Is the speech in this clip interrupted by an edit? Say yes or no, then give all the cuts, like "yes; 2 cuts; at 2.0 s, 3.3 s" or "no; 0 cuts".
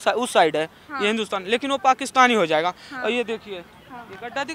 no; 0 cuts